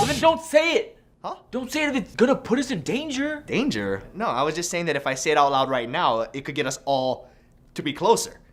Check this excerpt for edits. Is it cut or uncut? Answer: uncut